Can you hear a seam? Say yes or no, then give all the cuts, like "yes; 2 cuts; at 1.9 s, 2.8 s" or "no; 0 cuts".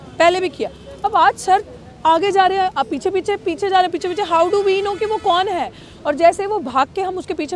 no; 0 cuts